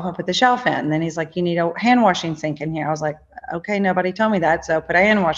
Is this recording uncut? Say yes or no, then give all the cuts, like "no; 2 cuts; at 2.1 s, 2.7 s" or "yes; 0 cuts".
yes; 0 cuts